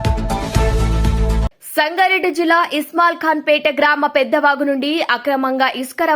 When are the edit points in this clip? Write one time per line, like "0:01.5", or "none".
none